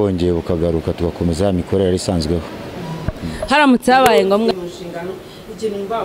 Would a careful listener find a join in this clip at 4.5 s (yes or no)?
yes